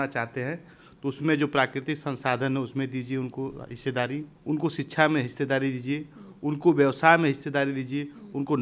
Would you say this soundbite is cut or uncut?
cut